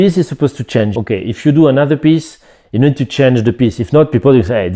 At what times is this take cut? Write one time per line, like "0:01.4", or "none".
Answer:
0:00.9